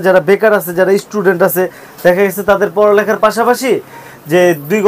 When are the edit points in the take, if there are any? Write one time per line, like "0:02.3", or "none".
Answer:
none